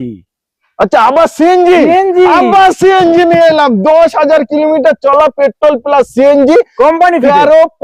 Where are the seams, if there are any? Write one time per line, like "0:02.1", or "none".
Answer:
none